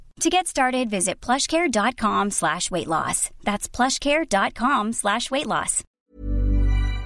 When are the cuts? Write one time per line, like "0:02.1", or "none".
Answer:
0:05.9